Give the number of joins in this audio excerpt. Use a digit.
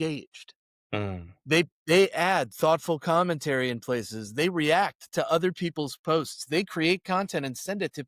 0